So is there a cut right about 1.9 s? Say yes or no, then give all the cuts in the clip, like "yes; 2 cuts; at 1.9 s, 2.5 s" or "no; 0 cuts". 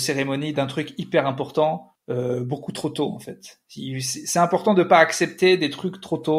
yes; 1 cut; at 1.9 s